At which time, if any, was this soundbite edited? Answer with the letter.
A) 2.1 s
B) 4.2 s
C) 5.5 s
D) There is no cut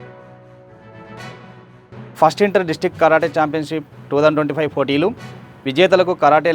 A